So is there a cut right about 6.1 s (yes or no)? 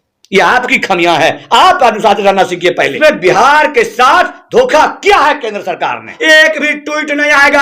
yes